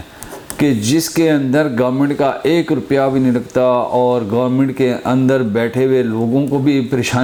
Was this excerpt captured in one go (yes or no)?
yes